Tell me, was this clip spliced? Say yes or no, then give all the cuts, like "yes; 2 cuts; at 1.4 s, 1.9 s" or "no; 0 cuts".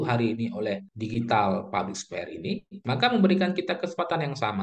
yes; 2 cuts; at 0.9 s, 2.7 s